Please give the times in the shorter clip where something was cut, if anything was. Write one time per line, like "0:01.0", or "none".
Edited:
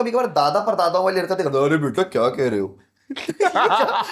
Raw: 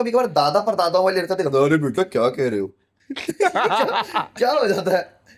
none